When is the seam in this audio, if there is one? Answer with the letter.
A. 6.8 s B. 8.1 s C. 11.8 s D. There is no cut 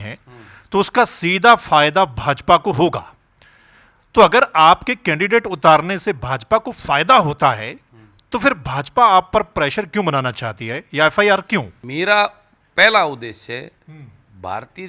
C